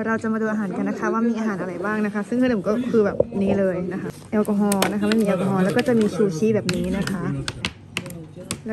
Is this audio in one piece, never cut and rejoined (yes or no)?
no